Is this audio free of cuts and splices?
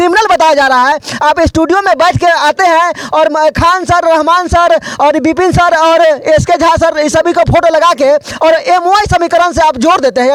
yes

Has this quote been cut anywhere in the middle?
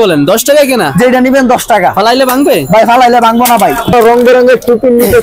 yes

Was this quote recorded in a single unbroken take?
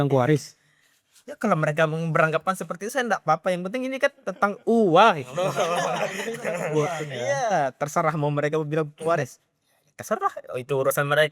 yes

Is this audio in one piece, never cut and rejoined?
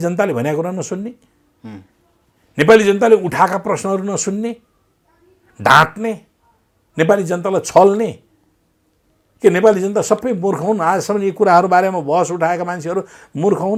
yes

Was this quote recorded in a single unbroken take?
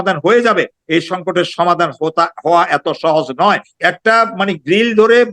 no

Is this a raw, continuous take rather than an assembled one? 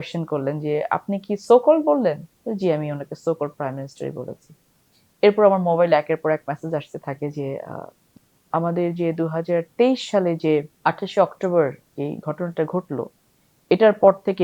no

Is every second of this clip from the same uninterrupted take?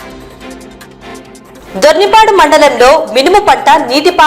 no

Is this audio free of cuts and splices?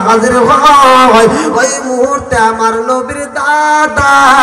yes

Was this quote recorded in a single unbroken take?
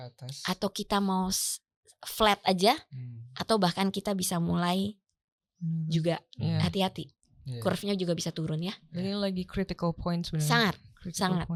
yes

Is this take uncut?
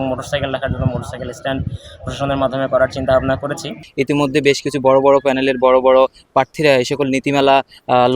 no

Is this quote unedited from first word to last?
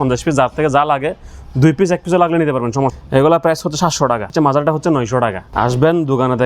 no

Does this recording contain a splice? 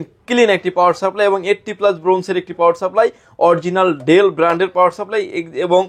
no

